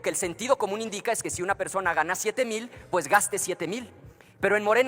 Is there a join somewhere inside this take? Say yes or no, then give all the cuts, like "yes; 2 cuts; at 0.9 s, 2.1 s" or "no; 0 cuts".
no; 0 cuts